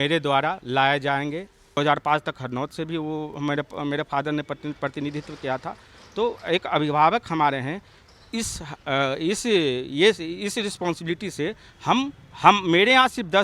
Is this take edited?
yes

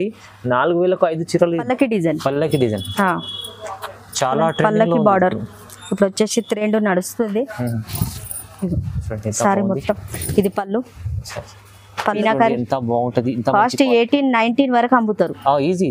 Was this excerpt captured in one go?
no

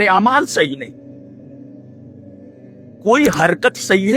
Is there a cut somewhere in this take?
yes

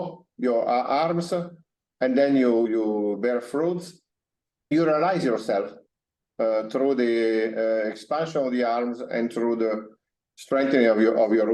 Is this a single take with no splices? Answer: no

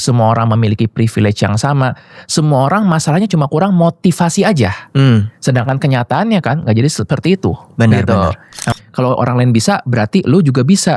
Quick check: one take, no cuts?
no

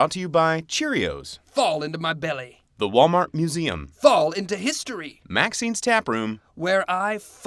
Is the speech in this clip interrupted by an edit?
no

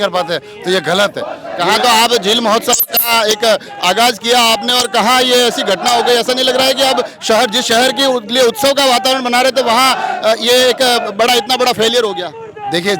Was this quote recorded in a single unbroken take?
yes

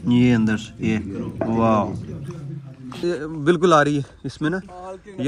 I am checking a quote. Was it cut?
yes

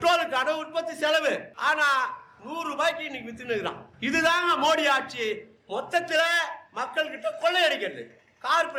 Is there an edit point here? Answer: no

